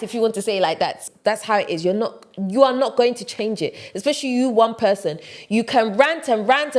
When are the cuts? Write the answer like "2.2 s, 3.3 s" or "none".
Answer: 1.1 s